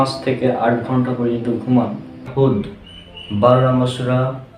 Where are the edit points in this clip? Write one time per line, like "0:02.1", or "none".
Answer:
0:02.3